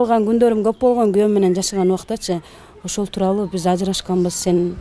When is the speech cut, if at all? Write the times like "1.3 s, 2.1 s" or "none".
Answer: none